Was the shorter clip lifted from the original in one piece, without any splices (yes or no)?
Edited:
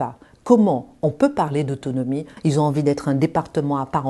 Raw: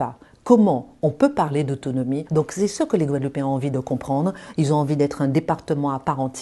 no